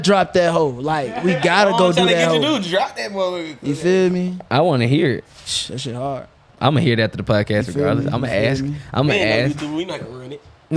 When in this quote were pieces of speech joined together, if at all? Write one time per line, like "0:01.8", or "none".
none